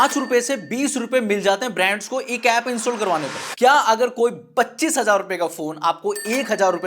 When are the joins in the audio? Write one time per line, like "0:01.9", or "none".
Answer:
0:03.4